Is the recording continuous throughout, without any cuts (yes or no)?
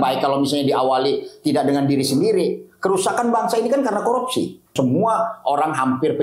no